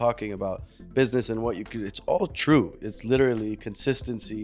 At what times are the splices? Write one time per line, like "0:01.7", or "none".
none